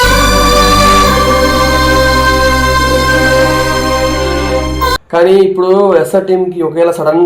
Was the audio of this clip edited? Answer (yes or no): yes